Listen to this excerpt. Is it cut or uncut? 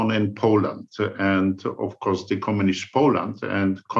uncut